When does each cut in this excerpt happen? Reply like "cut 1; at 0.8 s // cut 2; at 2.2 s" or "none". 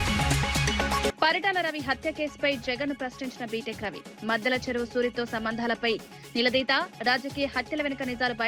cut 1; at 1.1 s